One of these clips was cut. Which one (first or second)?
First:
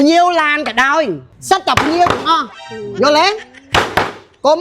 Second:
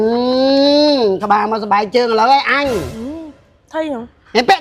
first